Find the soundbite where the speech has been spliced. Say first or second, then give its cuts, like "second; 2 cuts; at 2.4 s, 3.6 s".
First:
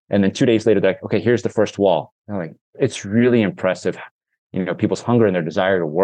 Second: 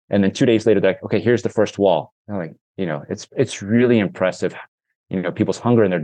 first; 1 cut; at 2.6 s